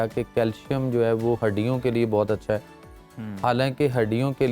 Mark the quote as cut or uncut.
uncut